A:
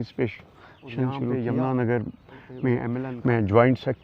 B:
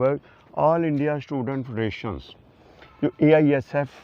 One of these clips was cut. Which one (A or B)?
A